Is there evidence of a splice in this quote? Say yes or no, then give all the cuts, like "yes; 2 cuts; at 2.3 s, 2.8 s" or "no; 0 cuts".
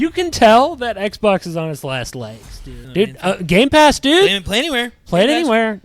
yes; 1 cut; at 2.8 s